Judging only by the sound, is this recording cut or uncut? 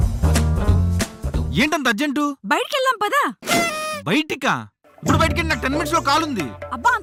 uncut